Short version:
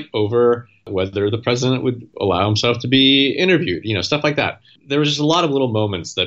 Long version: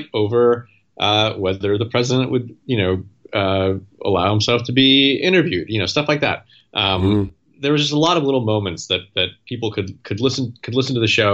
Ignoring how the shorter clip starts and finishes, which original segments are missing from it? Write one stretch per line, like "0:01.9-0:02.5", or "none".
0:00.9-0:01.3
0:02.5-0:03.9
0:06.6-0:07.4

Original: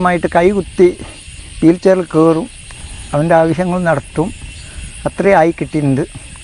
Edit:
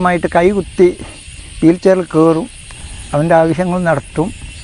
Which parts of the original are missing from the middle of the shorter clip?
none

